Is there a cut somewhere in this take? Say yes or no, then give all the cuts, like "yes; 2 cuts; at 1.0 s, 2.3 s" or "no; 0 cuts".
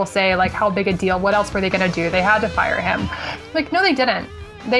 no; 0 cuts